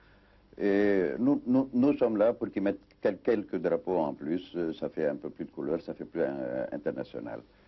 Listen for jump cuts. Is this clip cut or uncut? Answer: uncut